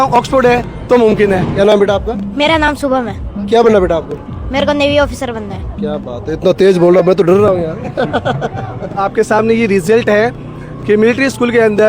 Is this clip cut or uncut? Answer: cut